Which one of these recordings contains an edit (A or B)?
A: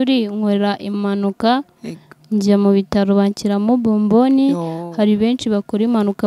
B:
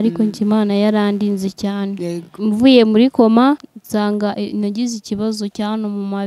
B